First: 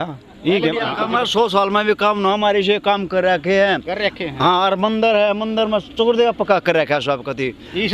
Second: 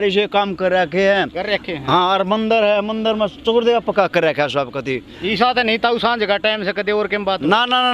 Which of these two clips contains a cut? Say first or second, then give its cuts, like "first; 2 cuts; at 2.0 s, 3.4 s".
first; 1 cut; at 0.9 s